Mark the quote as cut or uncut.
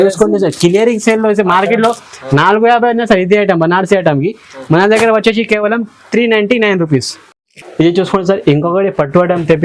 uncut